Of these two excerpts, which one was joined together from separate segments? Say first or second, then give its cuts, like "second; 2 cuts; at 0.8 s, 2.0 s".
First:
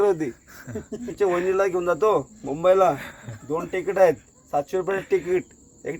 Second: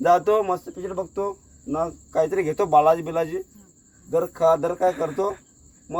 first; 1 cut; at 1.1 s